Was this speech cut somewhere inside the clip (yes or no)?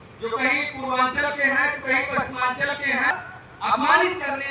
yes